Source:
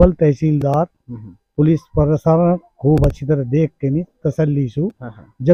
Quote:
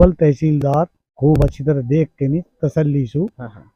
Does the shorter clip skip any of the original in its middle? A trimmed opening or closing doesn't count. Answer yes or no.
yes